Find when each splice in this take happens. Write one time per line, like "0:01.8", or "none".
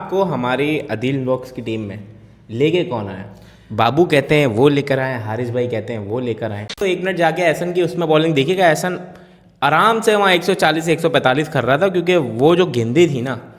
0:06.8